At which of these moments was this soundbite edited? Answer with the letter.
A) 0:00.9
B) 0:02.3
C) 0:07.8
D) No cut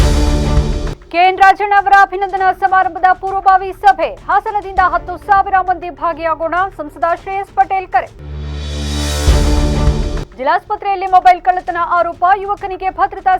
A